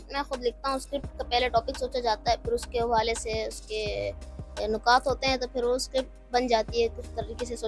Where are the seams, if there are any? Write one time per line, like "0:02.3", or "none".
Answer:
none